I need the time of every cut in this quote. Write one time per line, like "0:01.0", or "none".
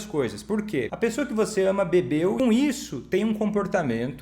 0:00.9
0:02.4